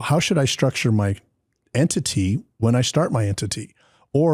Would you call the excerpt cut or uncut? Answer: uncut